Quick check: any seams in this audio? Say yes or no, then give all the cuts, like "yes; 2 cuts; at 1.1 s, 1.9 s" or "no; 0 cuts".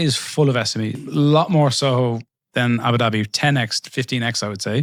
no; 0 cuts